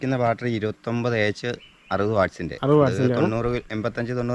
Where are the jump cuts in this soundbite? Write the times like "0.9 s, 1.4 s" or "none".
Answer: none